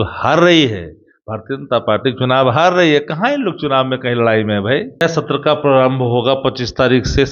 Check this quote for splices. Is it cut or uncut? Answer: cut